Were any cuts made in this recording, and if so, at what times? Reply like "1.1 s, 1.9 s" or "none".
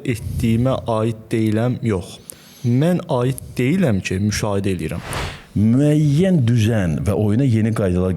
5.1 s